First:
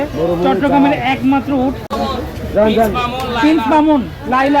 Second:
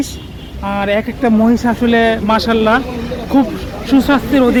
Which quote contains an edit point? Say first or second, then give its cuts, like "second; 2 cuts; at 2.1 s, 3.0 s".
first; 1 cut; at 2.1 s